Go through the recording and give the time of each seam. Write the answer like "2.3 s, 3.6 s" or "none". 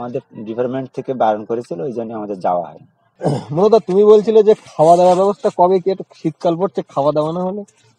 none